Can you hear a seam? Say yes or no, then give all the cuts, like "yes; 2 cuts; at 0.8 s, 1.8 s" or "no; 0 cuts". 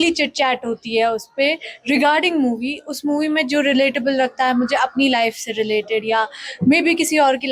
no; 0 cuts